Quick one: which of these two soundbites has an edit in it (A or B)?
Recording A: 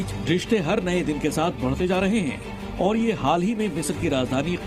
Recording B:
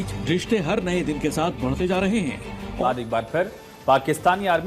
B